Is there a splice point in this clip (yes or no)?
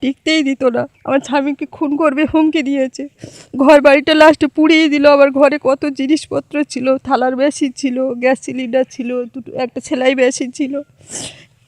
no